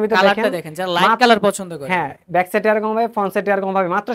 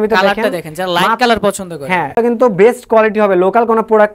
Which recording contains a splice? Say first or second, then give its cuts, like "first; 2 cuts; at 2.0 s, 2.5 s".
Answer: second; 1 cut; at 2.2 s